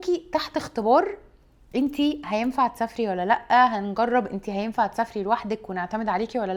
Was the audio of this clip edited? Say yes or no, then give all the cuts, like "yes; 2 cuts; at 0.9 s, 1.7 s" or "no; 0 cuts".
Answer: no; 0 cuts